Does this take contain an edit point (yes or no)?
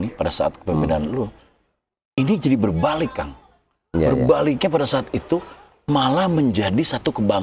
no